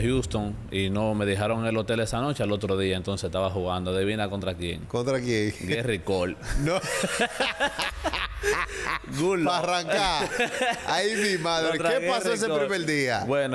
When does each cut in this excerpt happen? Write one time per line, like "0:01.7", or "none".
none